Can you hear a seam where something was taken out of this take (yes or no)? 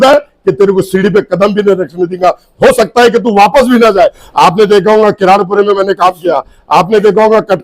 yes